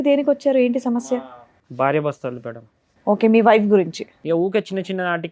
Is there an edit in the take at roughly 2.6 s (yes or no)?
no